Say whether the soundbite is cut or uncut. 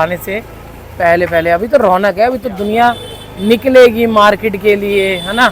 uncut